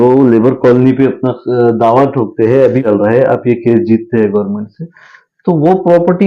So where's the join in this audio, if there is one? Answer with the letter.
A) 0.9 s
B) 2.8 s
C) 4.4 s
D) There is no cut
B